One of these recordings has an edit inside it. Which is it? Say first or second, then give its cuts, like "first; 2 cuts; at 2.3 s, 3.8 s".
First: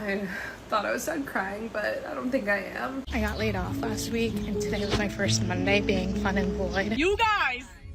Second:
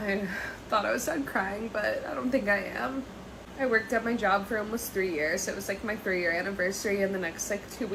first; 2 cuts; at 3.1 s, 7.0 s